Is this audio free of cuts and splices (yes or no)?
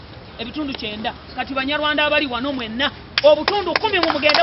yes